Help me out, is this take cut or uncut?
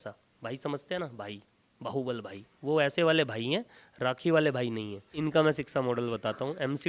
cut